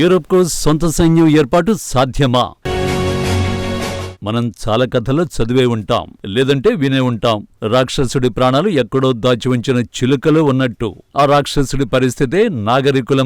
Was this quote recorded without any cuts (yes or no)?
no